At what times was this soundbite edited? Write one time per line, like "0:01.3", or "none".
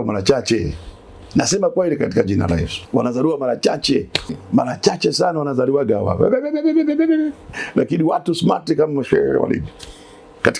0:02.7
0:04.4
0:07.6